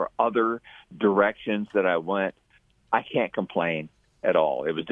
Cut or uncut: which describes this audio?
uncut